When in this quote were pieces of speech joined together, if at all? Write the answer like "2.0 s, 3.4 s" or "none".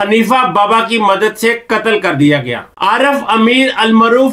2.6 s